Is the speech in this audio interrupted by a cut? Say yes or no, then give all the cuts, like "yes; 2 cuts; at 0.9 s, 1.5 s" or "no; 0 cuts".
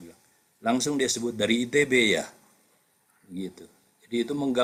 no; 0 cuts